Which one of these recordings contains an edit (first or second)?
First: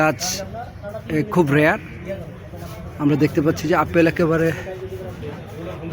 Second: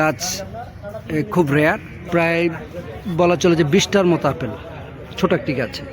second